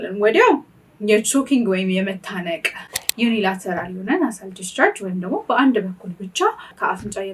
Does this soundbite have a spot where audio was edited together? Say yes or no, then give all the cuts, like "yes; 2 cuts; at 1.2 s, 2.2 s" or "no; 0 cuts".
yes; 1 cut; at 2.9 s